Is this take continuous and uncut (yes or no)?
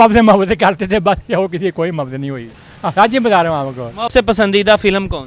no